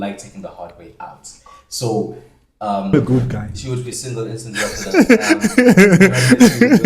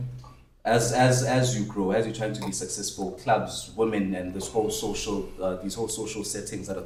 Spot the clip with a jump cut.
first; 1 cut; at 2.9 s

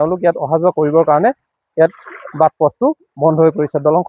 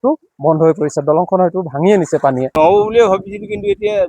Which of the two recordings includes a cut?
second; 1 cut; at 2.5 s

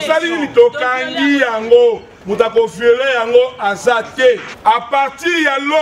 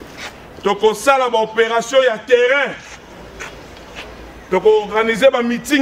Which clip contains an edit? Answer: first; 1 cut; at 4.5 s

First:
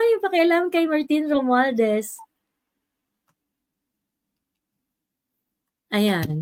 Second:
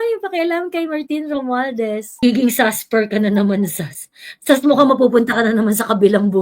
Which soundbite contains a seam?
second; 1 cut; at 2.2 s

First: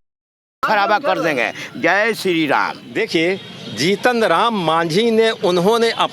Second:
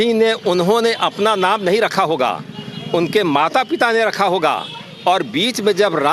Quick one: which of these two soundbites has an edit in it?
first; 1 cut; at 2.8 s

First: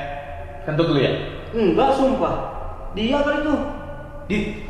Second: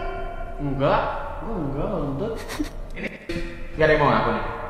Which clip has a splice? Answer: second; 1 cut; at 3.3 s

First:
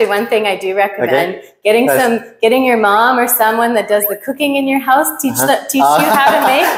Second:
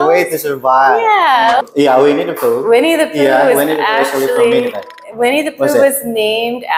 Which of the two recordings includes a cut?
second; 1 cut; at 1.7 s

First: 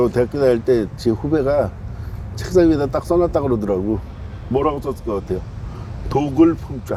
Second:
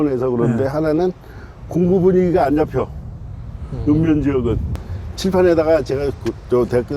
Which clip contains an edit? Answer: second; 1 cut; at 4.8 s

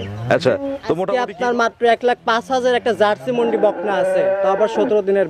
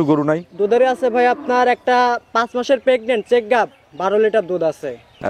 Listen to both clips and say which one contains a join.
first; 1 cut; at 1.0 s

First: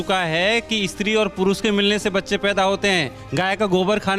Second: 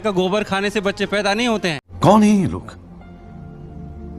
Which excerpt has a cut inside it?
second; 1 cut; at 1.8 s

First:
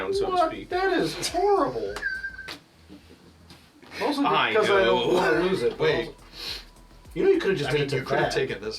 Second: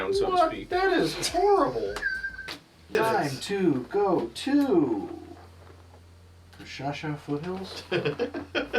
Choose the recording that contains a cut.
second; 1 cut; at 2.9 s

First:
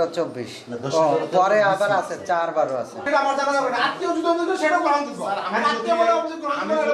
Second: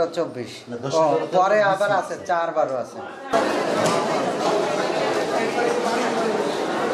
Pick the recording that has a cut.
first; 1 cut; at 3.0 s

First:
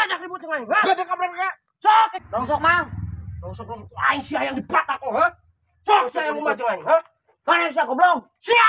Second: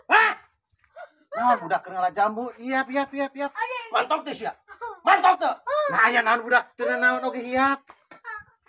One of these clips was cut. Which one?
first; 1 cut; at 2.2 s

